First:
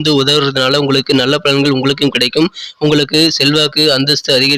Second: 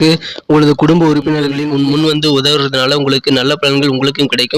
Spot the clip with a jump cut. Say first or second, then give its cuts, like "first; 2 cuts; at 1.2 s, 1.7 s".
second; 1 cut; at 1.3 s